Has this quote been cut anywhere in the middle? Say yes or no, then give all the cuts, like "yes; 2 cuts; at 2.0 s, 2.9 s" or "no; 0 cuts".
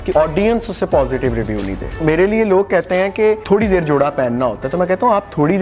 yes; 2 cuts; at 2.0 s, 3.4 s